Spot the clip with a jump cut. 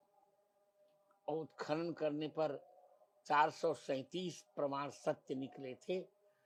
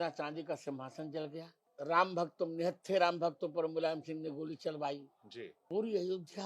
second; 2 cuts; at 1.6 s, 5.5 s

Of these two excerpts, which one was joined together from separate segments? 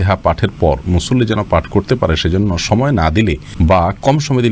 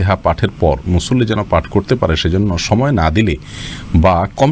first; 1 cut; at 3.5 s

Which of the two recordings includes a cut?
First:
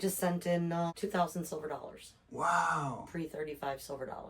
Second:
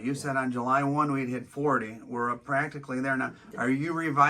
first; 1 cut; at 1.0 s

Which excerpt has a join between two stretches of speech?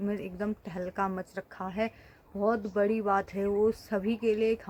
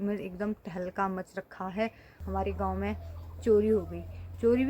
second; 1 cut; at 2.1 s

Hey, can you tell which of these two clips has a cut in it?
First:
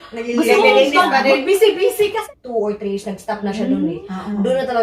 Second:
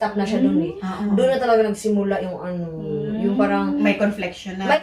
first; 1 cut; at 2.2 s

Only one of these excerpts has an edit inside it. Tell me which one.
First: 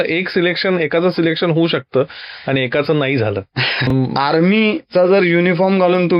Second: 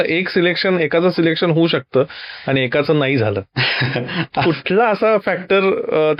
first; 1 cut; at 3.9 s

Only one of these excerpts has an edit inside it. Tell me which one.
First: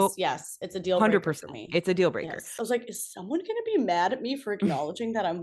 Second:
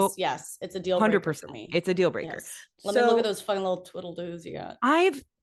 first; 1 cut; at 2.6 s

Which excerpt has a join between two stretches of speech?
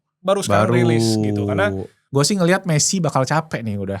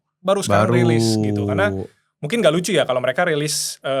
first; 1 cut; at 2.0 s

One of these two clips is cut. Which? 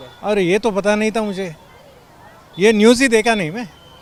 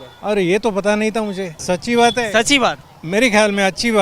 second; 2 cuts; at 1.5 s, 2.9 s

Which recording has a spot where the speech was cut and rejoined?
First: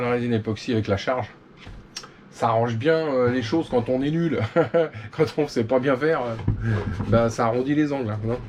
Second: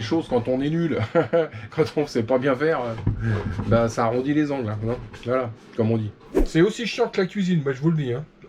second; 1 cut; at 6.1 s

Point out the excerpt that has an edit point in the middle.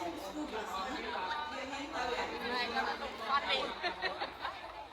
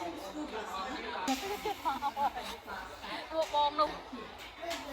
second; 2 cuts; at 1.3 s, 3.9 s

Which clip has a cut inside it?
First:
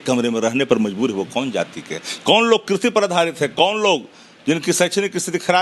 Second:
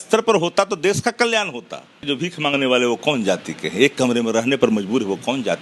second; 1 cut; at 2.0 s

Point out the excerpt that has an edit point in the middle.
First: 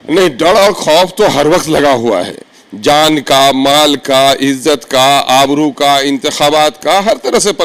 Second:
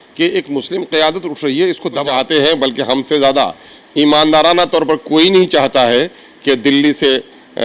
second; 1 cut; at 2.0 s

